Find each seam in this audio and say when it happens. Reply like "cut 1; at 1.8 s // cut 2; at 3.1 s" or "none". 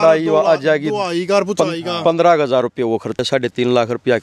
cut 1; at 3.2 s